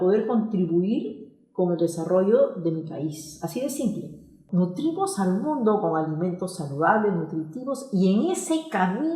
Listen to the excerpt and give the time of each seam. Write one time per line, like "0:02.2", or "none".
0:04.4